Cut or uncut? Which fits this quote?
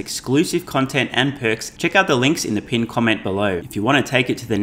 cut